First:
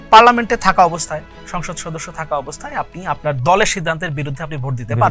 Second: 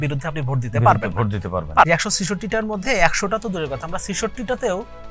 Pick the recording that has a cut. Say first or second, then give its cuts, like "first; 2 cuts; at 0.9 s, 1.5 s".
second; 1 cut; at 1.9 s